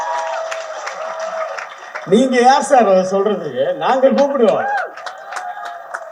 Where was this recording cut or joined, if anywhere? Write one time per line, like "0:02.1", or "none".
none